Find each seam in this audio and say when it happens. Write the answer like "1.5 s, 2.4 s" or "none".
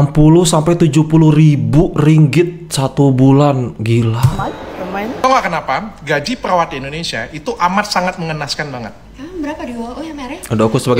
5.2 s